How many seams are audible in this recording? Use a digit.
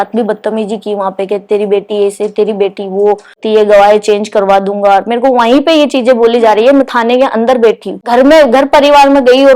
2